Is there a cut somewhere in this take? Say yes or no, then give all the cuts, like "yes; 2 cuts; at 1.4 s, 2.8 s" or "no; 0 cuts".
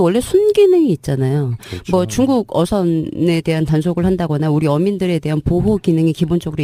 no; 0 cuts